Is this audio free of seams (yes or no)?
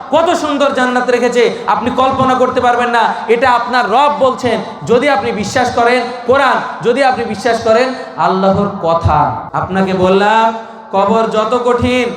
no